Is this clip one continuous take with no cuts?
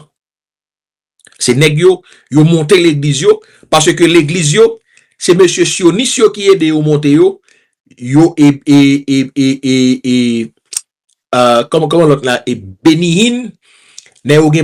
yes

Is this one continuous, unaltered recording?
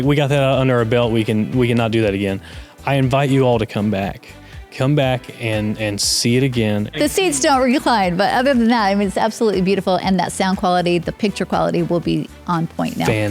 no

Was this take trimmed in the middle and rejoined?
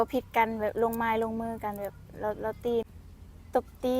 yes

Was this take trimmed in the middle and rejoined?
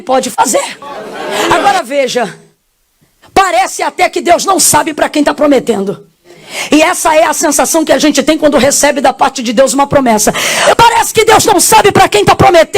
yes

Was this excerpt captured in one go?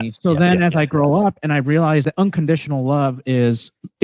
no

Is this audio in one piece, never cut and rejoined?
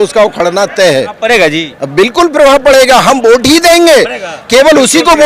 no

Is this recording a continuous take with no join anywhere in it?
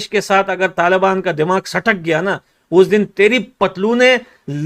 yes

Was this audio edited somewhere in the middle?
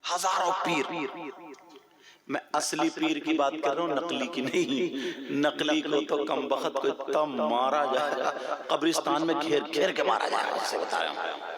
no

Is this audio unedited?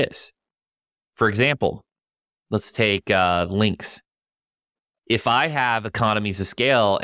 yes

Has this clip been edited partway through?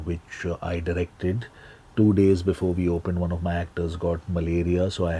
no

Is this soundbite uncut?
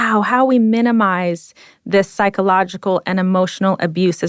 yes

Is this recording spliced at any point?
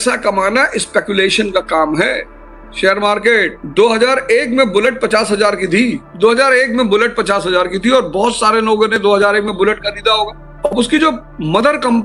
no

